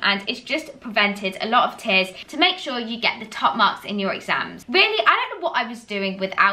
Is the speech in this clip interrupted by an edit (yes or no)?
yes